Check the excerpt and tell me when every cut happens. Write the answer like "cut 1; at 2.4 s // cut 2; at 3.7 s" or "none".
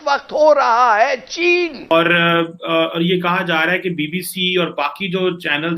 cut 1; at 1.9 s